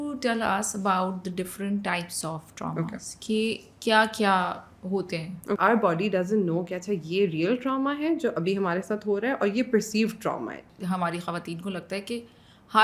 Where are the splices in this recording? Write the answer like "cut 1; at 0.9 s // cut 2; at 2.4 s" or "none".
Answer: cut 1; at 5.6 s // cut 2; at 10.7 s